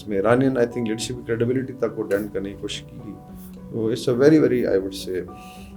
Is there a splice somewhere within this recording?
no; 0 cuts

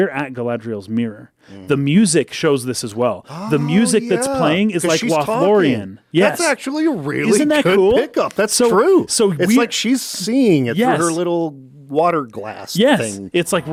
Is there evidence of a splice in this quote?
no; 0 cuts

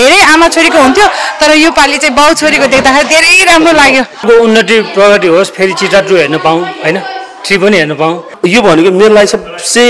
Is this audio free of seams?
no; 2 cuts; at 4.2 s, 8.3 s

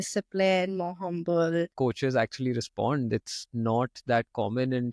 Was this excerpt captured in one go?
no; 1 cut; at 1.7 s

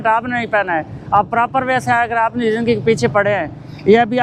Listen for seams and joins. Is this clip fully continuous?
yes; 0 cuts

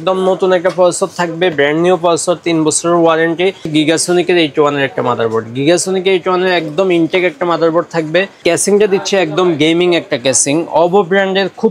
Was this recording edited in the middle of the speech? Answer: yes; 2 cuts; at 3.6 s, 8.4 s

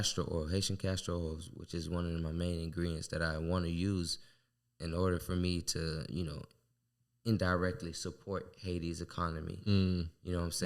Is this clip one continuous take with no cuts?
yes; 0 cuts

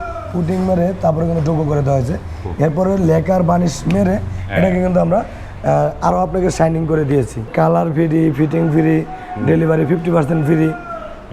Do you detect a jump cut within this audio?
yes; 1 cut; at 7.5 s

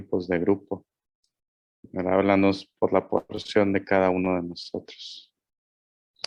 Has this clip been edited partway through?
no; 0 cuts

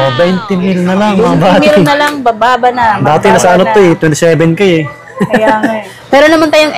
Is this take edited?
yes; 1 cut; at 5.9 s

